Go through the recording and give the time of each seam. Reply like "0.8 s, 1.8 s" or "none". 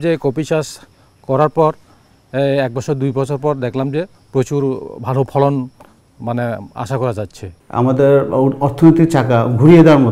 7.6 s